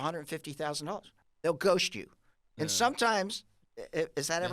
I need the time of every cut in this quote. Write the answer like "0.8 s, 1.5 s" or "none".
1.1 s